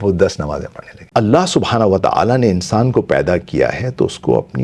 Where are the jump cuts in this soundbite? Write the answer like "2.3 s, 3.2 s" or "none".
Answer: 1.0 s